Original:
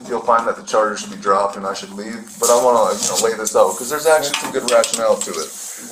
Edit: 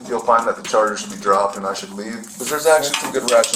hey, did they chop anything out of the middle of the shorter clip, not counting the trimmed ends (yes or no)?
yes